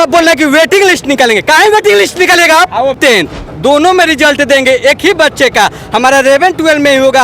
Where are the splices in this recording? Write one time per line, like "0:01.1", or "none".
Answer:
0:03.0